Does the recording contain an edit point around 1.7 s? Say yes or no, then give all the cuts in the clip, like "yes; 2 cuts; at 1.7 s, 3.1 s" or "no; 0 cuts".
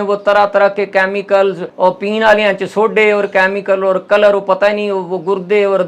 yes; 1 cut; at 1.7 s